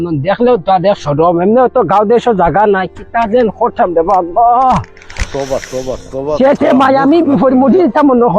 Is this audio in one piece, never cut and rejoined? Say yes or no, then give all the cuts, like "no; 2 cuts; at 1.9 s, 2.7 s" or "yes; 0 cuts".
yes; 0 cuts